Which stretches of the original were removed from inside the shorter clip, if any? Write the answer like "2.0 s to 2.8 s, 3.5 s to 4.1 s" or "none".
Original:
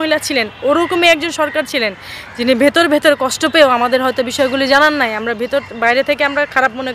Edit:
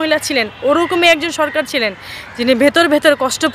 none